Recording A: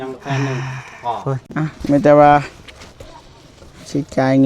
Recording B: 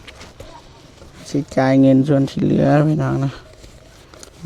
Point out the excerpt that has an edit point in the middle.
A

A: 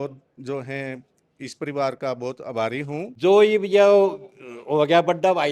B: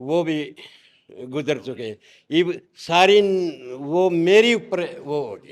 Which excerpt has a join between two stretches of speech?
A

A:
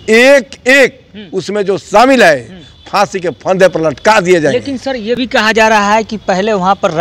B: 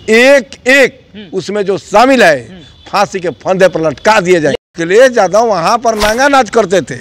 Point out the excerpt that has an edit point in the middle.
B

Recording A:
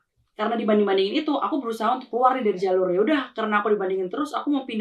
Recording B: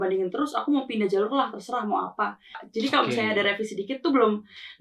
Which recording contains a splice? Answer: B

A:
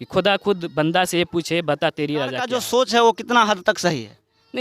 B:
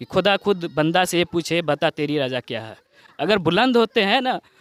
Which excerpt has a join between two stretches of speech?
A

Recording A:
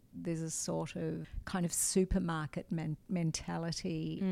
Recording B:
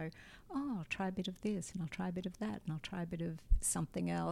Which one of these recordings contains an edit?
A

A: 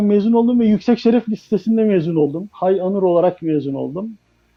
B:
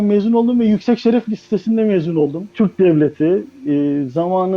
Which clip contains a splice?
B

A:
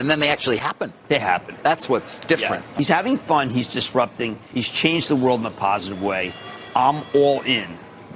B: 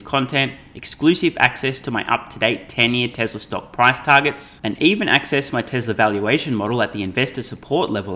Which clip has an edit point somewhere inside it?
A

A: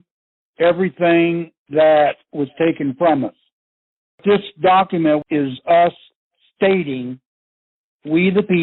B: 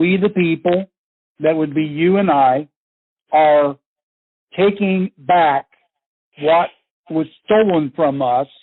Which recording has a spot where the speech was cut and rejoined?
A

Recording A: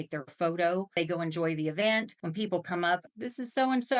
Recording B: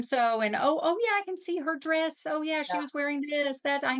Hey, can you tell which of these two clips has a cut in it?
A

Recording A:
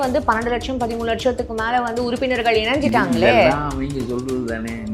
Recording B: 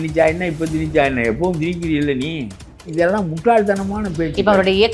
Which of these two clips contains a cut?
B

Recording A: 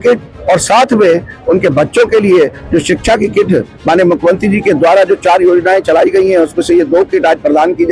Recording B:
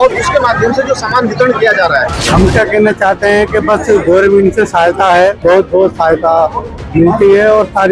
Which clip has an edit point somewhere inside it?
B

